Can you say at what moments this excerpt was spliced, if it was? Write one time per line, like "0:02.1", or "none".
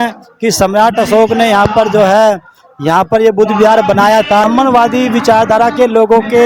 0:04.4